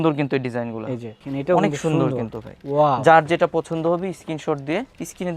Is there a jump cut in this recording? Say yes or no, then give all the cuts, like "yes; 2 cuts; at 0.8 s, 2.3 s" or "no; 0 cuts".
yes; 1 cut; at 1.2 s